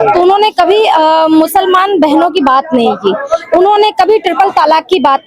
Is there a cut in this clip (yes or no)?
no